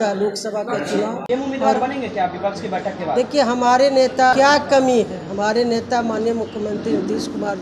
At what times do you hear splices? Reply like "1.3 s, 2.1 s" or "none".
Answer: 1.2 s, 4.3 s

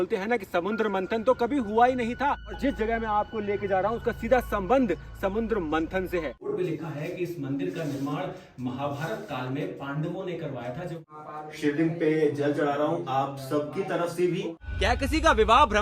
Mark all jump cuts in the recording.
6.5 s, 11.1 s, 14.6 s

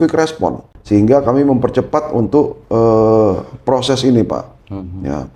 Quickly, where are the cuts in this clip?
none

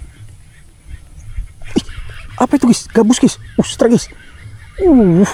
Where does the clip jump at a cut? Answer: none

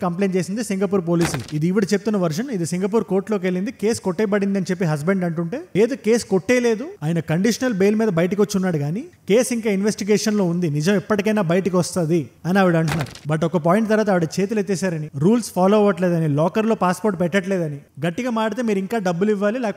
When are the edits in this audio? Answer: 1.5 s, 13.2 s

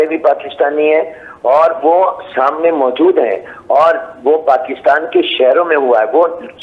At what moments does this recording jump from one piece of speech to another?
none

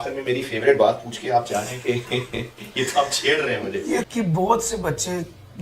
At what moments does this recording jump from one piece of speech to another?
4.1 s

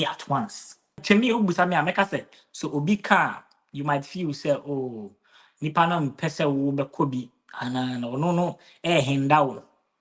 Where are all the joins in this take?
1.0 s

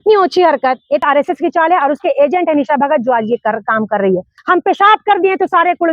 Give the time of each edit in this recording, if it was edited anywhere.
1.0 s, 4.3 s

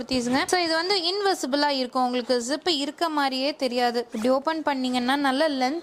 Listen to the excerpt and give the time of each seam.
none

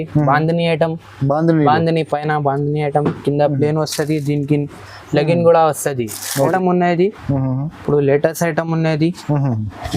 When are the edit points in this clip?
6.5 s

